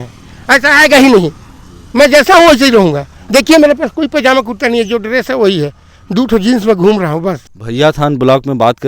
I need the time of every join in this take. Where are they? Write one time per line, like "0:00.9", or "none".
0:07.5